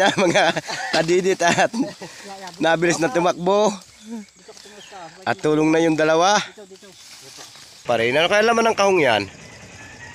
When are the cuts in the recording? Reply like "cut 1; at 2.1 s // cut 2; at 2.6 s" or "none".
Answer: cut 1; at 7.8 s